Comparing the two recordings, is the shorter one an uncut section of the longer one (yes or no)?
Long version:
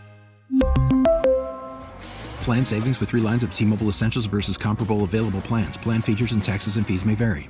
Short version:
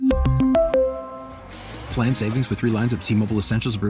yes